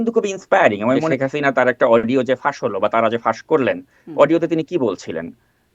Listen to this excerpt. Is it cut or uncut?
cut